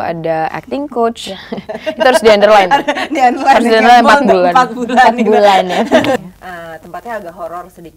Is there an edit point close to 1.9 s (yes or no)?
no